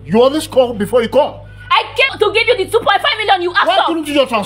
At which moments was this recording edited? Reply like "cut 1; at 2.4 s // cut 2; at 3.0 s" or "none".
cut 1; at 2.1 s